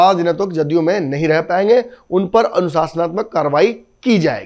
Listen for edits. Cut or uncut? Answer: uncut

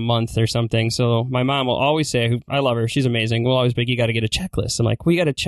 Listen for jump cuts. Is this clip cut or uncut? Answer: uncut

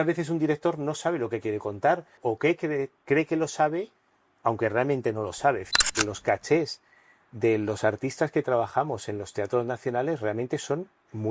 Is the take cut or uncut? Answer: cut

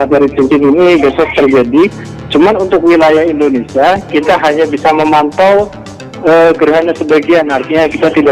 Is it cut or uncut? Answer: uncut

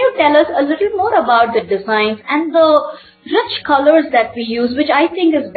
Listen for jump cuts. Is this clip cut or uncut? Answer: uncut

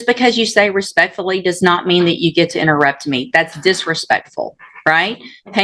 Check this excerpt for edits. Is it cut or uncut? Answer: uncut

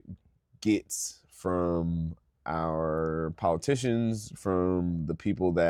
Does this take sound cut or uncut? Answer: uncut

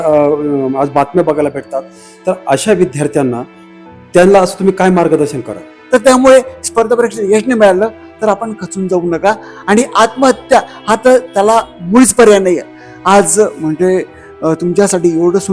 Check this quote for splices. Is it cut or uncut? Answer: cut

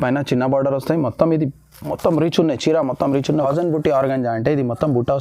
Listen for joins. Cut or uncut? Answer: cut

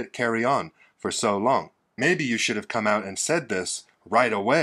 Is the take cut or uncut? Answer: cut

